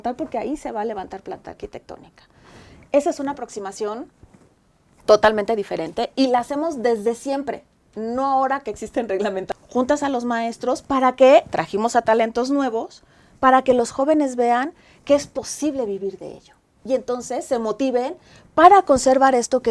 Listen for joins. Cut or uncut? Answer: cut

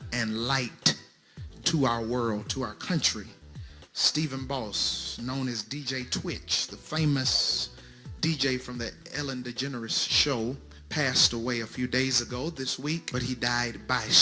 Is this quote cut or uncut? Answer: cut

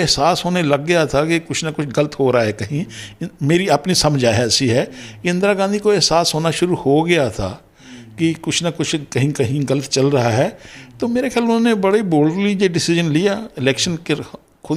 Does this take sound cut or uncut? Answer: uncut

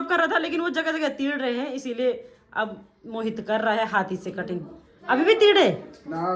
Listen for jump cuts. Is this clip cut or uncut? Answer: uncut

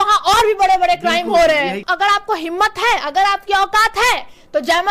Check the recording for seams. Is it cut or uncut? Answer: cut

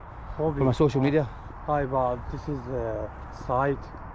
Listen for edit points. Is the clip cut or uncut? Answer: uncut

